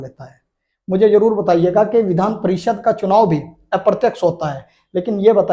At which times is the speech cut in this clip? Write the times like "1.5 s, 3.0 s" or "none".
none

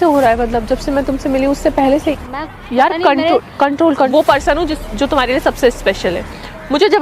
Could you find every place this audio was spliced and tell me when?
2.2 s, 4.1 s

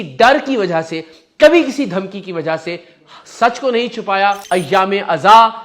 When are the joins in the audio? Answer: 4.4 s

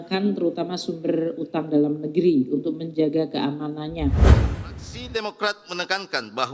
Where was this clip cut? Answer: 4.3 s

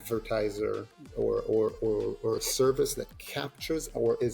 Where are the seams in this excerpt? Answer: 1.0 s

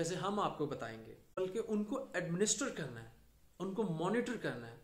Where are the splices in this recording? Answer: 1.3 s

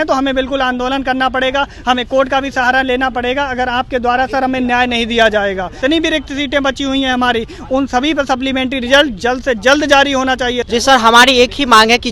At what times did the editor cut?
5.7 s, 10.7 s

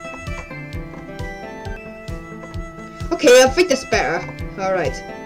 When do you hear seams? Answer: 1.8 s

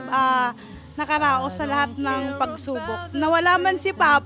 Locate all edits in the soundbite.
none

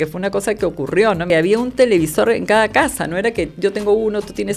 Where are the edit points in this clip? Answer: 1.3 s

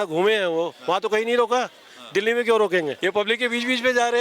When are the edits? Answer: 3.0 s

